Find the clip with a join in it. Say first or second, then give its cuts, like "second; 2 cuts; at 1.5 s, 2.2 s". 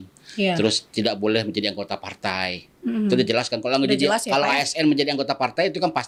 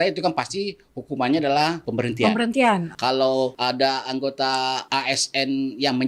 second; 3 cuts; at 1.8 s, 3.1 s, 4.8 s